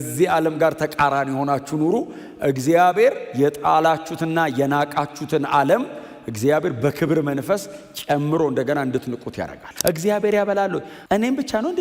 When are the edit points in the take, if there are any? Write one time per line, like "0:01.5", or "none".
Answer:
0:09.6
0:10.9